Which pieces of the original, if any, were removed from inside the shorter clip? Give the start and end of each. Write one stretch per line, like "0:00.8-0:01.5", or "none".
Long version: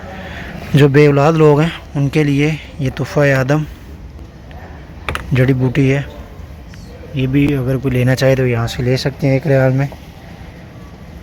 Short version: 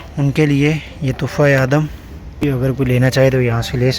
0:04.2-0:07.5